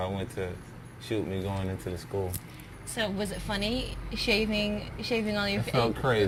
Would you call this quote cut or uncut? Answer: uncut